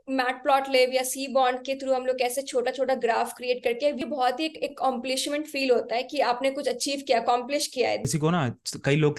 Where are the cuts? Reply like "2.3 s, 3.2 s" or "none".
4.0 s, 8.1 s